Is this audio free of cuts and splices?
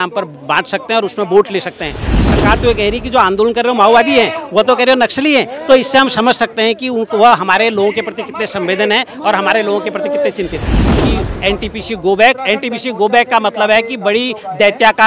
no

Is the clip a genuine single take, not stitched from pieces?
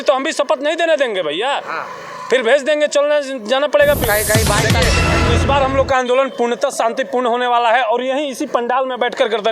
no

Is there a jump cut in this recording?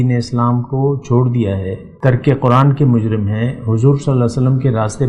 yes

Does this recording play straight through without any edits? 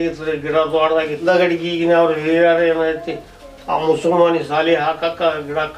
no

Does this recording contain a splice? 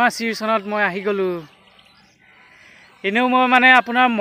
no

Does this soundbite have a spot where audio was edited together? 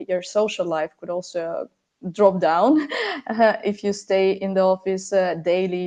no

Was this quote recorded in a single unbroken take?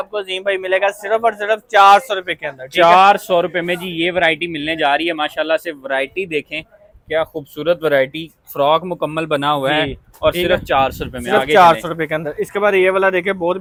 yes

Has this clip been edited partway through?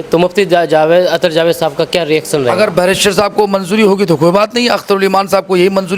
no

